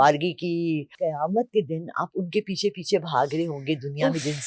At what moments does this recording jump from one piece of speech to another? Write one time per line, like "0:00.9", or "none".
0:01.0